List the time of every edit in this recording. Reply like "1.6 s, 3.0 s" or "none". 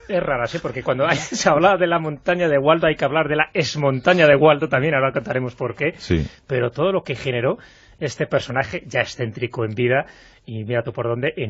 1.9 s